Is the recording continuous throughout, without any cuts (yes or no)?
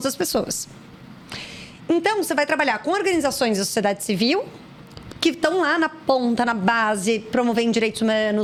yes